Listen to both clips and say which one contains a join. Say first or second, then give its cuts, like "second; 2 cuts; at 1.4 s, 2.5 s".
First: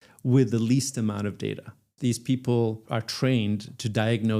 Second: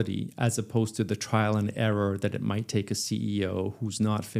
first; 2 cuts; at 1.9 s, 2.8 s